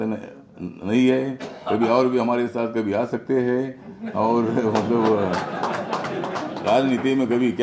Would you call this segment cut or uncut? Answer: uncut